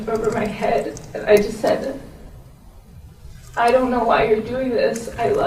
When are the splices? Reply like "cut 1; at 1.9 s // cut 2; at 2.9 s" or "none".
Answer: none